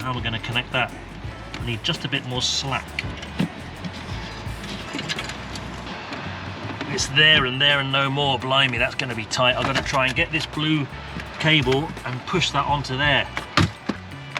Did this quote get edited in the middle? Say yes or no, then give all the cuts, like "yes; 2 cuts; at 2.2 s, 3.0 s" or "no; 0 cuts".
no; 0 cuts